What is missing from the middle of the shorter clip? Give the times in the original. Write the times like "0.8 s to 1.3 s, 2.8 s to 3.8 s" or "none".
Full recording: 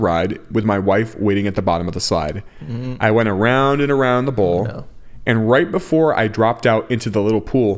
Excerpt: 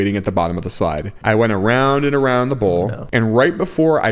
2.4 s to 2.9 s, 4.8 s to 5.1 s